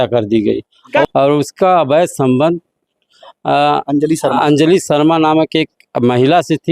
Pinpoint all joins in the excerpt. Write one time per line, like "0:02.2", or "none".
0:01.0